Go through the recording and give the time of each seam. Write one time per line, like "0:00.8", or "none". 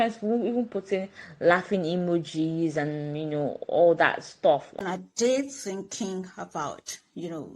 0:04.8